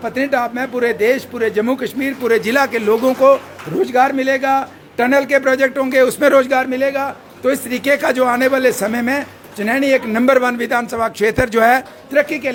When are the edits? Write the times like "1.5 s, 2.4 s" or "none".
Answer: none